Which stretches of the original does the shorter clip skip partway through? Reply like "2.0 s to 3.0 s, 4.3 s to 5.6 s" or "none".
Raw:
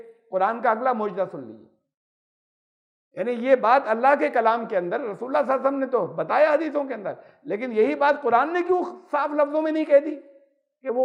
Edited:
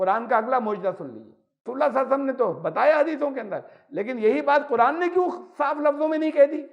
2.0 s to 5.2 s